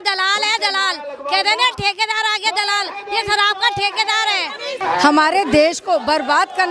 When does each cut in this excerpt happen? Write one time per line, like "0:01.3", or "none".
0:04.8